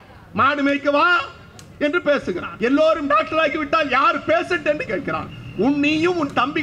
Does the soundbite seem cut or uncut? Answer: cut